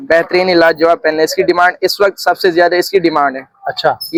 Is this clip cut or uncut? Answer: uncut